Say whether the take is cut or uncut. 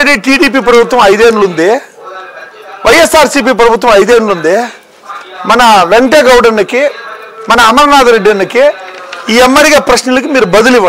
uncut